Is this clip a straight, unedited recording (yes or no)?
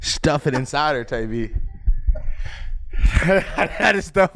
yes